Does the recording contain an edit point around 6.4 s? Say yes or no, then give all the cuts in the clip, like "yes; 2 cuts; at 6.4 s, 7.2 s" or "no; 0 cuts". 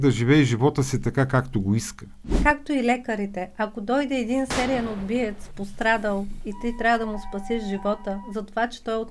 no; 1 cut; at 2.4 s